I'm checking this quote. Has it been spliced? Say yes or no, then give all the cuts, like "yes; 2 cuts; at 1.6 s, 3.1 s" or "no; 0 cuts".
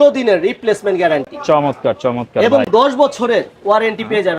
no; 0 cuts